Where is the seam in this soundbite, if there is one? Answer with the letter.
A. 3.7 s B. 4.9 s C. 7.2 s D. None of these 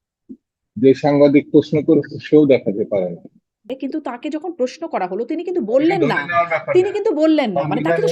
A